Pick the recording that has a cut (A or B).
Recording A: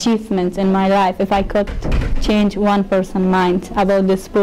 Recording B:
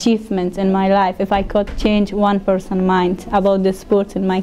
B